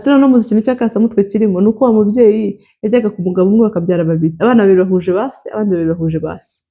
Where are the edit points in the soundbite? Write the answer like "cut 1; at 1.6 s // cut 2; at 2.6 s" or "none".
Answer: none